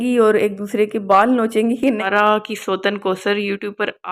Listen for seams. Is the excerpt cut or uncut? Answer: cut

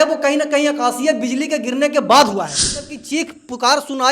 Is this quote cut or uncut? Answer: cut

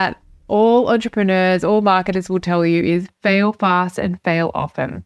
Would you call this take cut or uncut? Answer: uncut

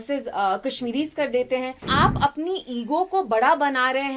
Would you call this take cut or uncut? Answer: cut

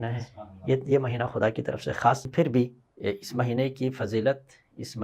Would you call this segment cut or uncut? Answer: cut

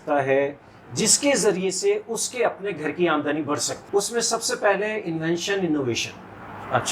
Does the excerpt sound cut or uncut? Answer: cut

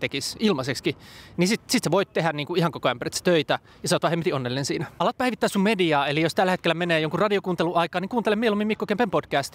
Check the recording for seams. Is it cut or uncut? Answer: cut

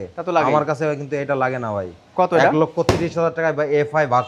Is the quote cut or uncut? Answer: uncut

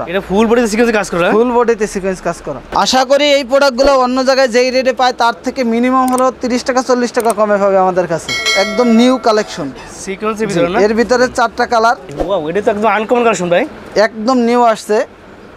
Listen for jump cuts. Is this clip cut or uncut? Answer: cut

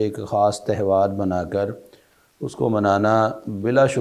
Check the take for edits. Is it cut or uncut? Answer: uncut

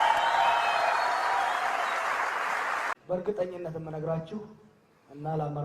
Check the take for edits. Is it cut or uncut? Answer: cut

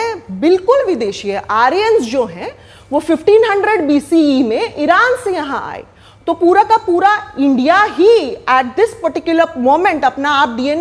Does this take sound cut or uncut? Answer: uncut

